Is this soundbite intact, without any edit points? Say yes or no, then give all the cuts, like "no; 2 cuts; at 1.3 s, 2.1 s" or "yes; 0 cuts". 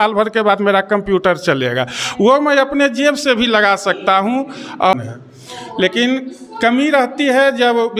no; 2 cuts; at 4.9 s, 6.9 s